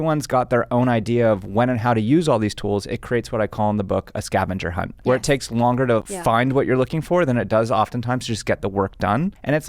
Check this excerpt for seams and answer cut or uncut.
cut